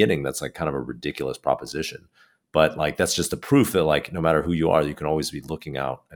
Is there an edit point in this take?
no; 0 cuts

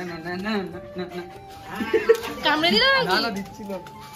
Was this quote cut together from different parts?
no; 0 cuts

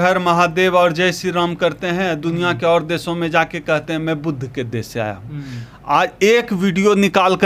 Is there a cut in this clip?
no; 0 cuts

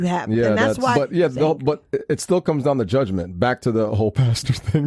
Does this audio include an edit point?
yes; 1 cut; at 0.9 s

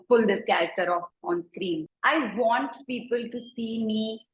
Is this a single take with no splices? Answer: no; 1 cut; at 1.9 s

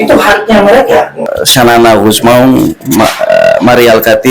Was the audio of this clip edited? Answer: yes; 1 cut; at 1.2 s

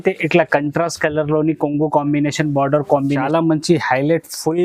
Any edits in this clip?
yes; 1 cut; at 3.2 s

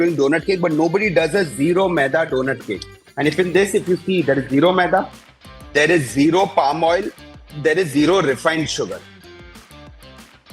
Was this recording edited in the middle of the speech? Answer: no; 0 cuts

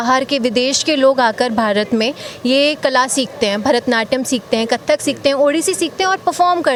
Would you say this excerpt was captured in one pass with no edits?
yes; 0 cuts

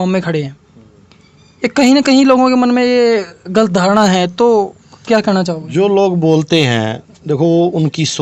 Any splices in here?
no; 0 cuts

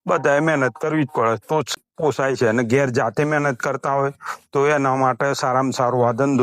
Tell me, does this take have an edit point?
yes; 1 cut; at 1.8 s

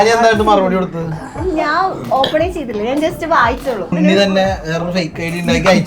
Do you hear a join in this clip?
yes; 1 cut; at 3.9 s

